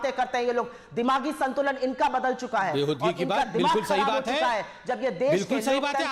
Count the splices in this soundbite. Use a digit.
0